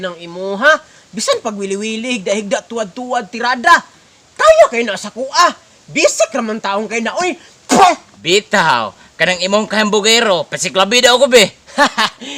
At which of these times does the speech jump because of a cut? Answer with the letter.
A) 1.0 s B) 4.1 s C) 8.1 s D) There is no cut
C